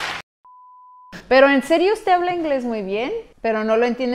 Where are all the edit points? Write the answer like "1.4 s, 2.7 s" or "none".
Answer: none